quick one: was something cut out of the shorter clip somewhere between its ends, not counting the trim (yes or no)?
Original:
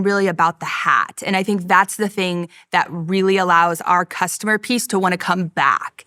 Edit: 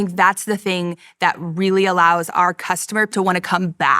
yes